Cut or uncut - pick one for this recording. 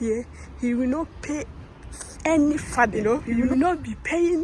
cut